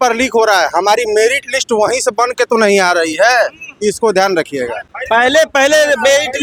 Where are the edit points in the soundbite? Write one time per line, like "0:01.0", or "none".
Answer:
none